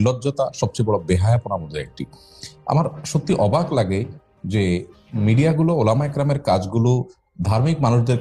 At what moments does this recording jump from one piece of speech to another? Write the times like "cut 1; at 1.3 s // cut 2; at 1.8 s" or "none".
none